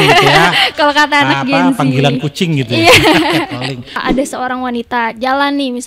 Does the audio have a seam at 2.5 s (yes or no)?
no